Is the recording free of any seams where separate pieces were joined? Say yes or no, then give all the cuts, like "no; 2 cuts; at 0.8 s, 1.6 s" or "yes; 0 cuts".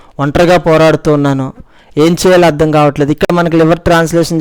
yes; 0 cuts